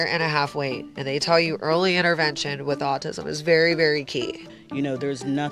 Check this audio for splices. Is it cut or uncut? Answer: cut